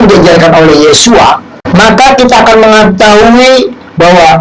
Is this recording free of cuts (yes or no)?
no